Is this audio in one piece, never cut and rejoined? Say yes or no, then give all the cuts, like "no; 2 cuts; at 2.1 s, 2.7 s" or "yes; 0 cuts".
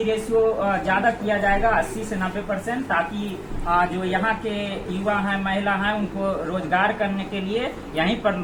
yes; 0 cuts